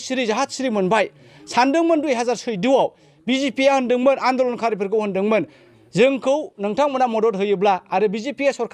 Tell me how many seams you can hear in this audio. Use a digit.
0